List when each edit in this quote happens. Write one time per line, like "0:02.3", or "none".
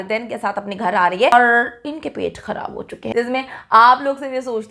0:01.3
0:03.0

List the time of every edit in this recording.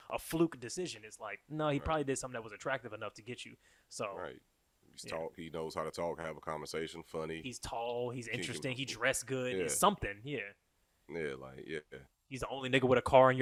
none

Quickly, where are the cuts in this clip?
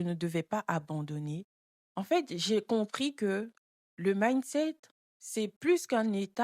0:01.5

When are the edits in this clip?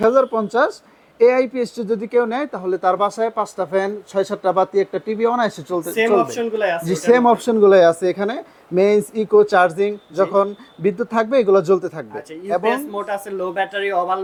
none

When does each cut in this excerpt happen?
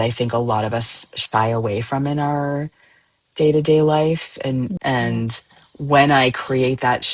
0:04.8

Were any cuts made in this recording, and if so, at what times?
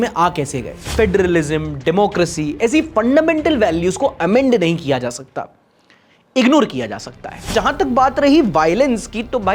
0:00.9
0:07.5

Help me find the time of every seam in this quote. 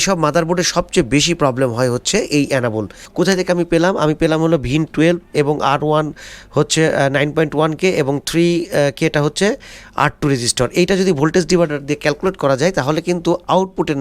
0:03.0

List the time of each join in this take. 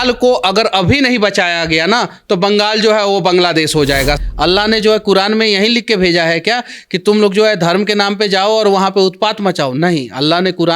0:04.2

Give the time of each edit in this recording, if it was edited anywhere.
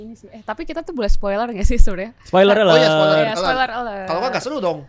none

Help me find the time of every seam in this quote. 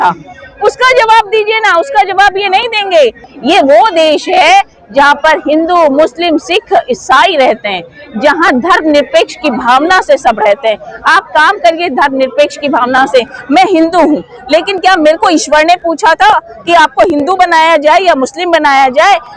0:03.3

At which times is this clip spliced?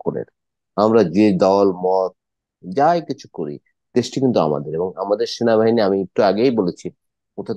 none

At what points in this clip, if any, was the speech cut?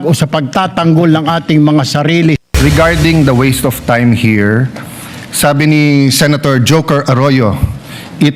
0:02.5

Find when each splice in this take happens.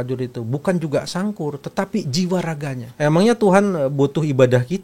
0:02.8

